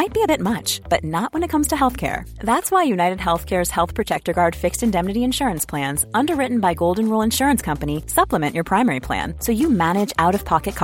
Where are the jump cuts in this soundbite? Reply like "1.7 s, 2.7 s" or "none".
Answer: none